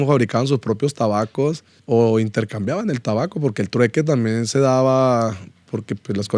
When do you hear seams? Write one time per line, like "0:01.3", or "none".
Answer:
0:01.7